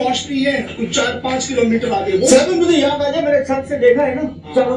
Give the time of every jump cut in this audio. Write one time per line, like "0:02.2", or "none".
0:02.8